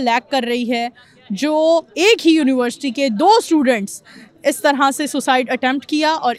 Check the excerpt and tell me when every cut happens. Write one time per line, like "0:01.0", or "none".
none